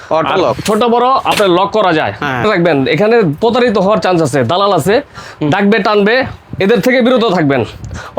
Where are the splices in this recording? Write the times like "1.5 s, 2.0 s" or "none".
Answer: 2.4 s